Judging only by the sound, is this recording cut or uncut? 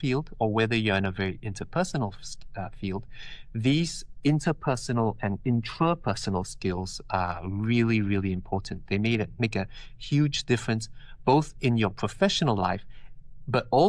uncut